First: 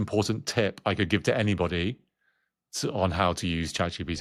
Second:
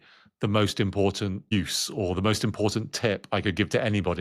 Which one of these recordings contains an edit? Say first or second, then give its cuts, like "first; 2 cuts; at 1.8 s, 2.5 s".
second; 1 cut; at 1.5 s